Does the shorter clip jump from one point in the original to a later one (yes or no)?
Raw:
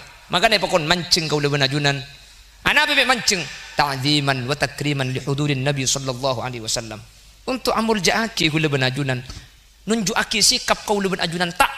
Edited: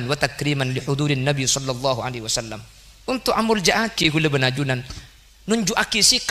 no